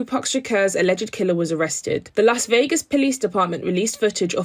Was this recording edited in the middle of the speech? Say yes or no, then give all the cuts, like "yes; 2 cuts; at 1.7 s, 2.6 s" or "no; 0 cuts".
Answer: no; 0 cuts